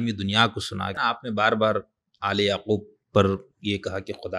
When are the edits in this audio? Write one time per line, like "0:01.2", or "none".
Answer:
0:00.9